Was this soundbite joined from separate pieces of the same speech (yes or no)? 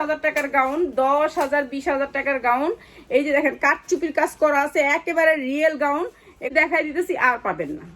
yes